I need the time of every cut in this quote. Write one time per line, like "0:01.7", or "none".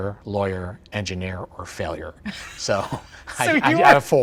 none